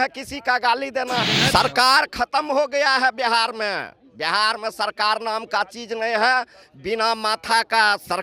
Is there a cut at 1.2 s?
yes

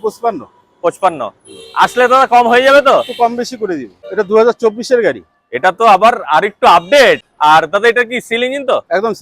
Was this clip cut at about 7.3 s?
yes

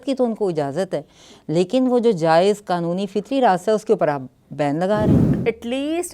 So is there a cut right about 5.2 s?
yes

